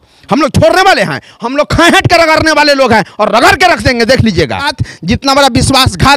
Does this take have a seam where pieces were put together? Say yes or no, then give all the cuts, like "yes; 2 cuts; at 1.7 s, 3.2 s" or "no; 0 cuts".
yes; 1 cut; at 4.8 s